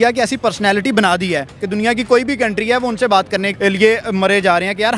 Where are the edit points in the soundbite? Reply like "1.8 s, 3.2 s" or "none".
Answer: 3.5 s